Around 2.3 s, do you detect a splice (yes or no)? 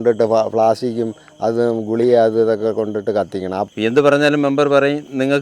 no